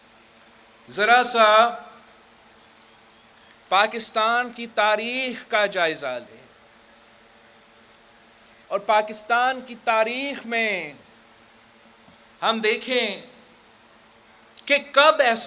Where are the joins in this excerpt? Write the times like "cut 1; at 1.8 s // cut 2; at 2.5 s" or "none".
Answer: cut 1; at 14.3 s